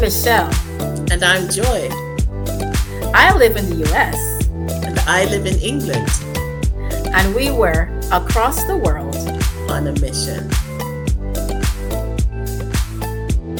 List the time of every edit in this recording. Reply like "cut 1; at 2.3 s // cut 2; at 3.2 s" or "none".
none